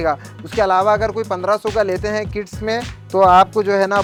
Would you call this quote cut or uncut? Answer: uncut